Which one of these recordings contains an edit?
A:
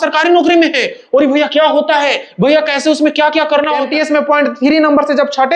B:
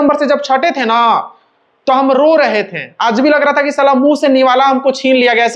A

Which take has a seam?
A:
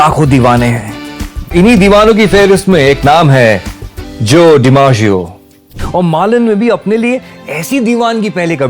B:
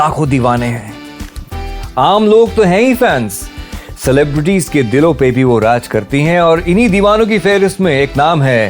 A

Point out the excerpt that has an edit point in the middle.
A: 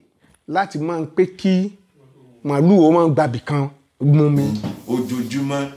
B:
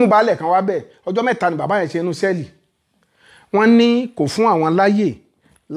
A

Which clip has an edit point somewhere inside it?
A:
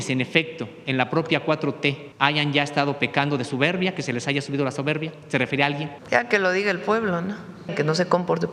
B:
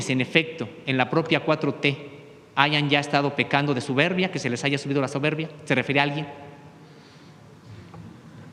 A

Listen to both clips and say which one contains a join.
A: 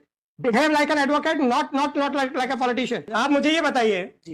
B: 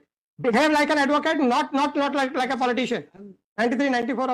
A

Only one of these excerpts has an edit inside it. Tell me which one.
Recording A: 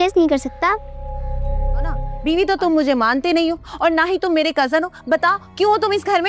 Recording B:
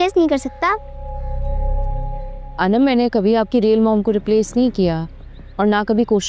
A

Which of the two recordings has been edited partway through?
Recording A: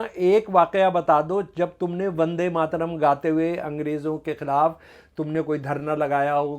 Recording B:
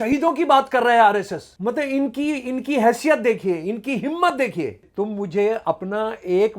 B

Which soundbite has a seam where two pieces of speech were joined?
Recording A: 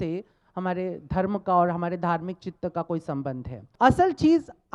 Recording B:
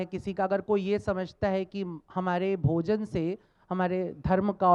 A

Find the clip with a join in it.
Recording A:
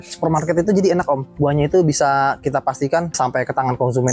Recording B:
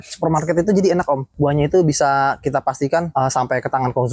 A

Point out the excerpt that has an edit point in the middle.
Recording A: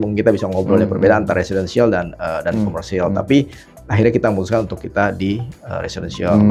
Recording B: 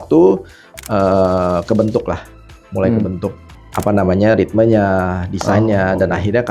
B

